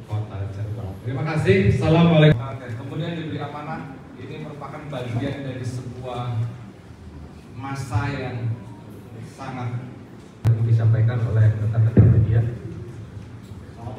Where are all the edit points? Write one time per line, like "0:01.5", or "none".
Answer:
0:02.3
0:10.4